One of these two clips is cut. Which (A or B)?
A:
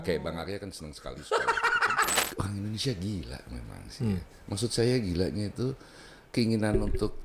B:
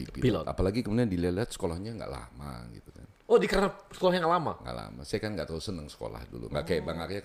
A